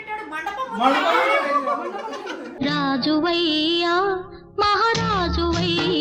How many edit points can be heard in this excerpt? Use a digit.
0